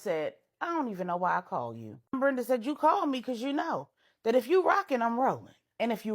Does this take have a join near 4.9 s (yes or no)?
no